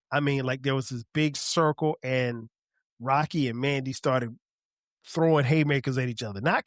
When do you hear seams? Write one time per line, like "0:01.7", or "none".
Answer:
none